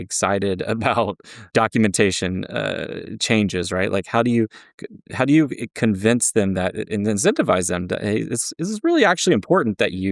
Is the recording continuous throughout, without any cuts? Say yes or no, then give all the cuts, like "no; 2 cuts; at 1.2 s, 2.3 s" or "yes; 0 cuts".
no; 1 cut; at 1.4 s